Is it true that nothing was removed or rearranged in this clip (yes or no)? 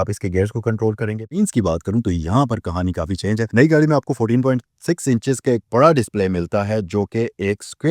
no